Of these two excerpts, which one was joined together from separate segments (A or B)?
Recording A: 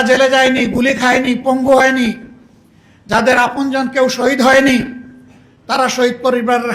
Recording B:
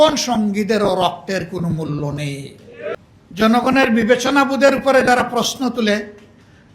B